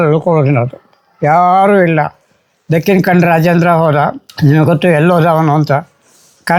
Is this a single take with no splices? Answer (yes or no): yes